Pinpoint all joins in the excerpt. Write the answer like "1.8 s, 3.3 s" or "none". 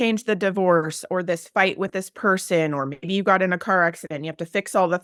none